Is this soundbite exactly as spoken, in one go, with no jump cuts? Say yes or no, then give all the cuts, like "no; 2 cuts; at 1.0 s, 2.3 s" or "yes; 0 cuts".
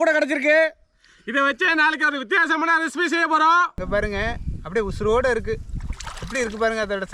no; 1 cut; at 3.8 s